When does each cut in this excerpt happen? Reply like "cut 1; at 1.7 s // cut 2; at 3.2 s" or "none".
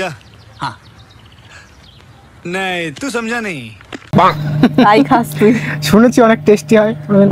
none